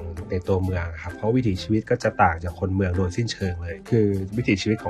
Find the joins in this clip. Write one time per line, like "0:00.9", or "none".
0:01.1
0:03.7